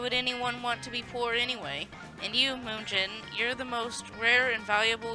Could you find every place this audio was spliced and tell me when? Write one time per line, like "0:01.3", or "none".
0:01.9